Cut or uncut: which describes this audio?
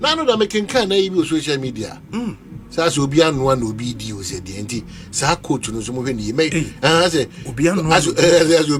uncut